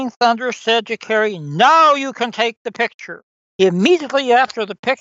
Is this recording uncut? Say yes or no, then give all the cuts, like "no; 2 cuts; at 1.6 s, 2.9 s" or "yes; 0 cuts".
no; 1 cut; at 3.3 s